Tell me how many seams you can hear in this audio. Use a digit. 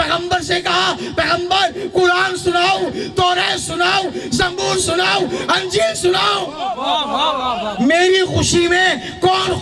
1